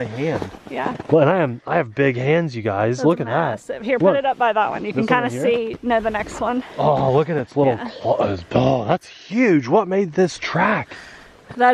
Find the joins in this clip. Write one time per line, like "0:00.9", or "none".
none

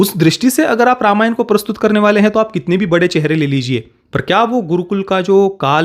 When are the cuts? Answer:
0:04.0

